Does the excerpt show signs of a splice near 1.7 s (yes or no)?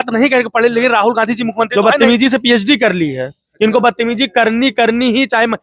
yes